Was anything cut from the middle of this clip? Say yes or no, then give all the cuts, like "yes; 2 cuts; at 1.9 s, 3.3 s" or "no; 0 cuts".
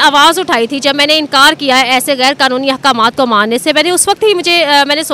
no; 0 cuts